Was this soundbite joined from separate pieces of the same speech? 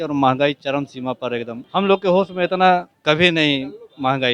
yes; 2 cuts; at 1.6 s, 2.9 s

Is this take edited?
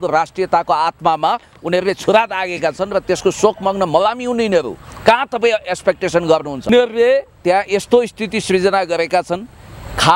yes; 1 cut; at 6.7 s

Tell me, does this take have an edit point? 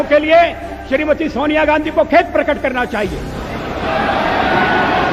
no; 0 cuts

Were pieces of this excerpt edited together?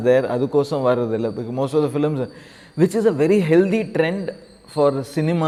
no; 0 cuts

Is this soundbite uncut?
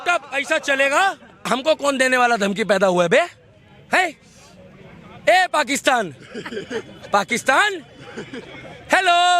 no; 1 cut; at 1.4 s

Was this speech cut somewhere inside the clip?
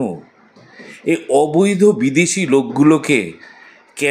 no; 0 cuts

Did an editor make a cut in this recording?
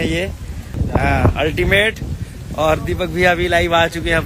no; 0 cuts

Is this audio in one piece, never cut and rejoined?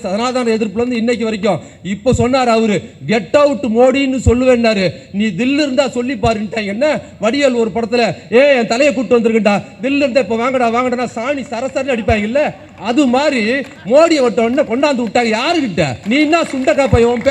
no; 1 cut; at 16.0 s

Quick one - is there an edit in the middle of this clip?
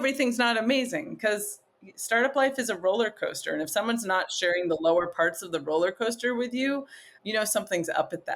yes; 1 cut; at 7.2 s

